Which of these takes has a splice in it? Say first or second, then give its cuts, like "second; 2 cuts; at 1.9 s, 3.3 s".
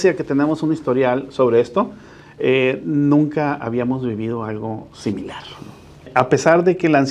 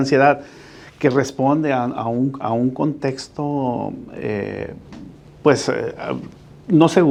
first; 1 cut; at 6.1 s